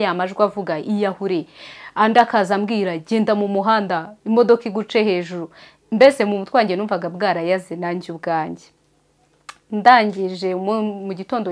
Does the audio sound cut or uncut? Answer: uncut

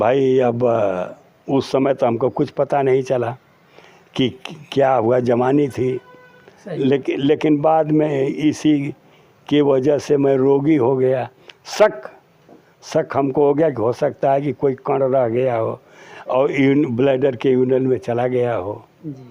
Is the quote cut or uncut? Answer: uncut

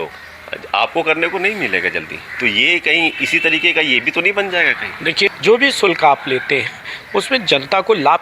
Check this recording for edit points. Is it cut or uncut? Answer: cut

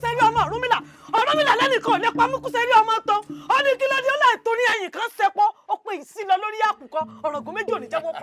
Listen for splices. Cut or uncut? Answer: uncut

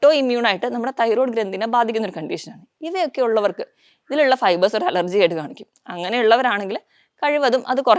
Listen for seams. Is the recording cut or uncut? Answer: uncut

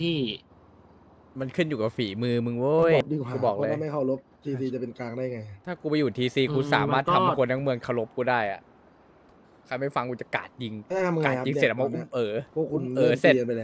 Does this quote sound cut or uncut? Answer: cut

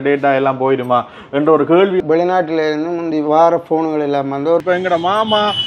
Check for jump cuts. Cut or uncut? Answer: cut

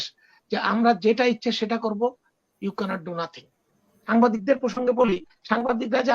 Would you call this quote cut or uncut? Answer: cut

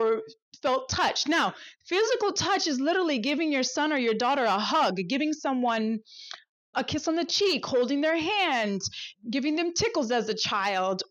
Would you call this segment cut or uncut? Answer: cut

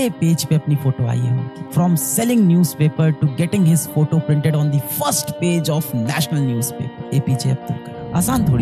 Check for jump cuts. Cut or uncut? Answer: uncut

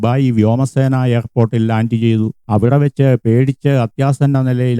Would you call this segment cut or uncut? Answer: cut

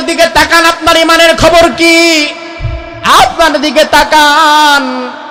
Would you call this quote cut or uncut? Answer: uncut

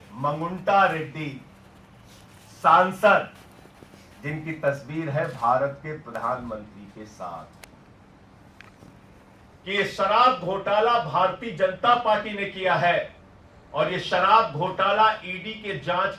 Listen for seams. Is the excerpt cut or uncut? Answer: cut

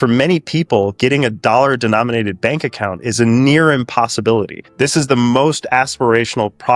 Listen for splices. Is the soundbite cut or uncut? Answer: uncut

